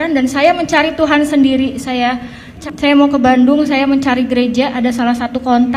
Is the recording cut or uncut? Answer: cut